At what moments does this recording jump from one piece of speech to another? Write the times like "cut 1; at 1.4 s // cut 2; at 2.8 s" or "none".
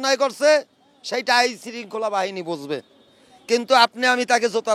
none